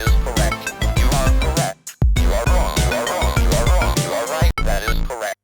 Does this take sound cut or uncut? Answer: cut